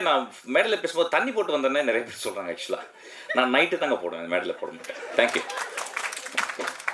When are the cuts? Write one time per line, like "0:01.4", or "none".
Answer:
none